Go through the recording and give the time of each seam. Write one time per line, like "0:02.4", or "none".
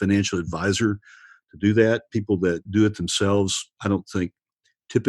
0:02.7